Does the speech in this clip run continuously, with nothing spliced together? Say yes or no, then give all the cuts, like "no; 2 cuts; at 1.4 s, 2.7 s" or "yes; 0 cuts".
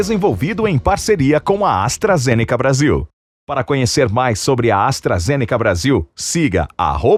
yes; 0 cuts